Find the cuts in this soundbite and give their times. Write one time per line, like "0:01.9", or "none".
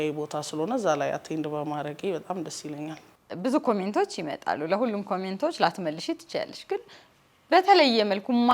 0:03.2